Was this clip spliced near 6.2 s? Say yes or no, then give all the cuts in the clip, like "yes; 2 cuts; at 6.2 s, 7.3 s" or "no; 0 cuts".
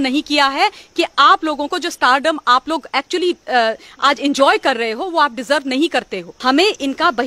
yes; 1 cut; at 6.2 s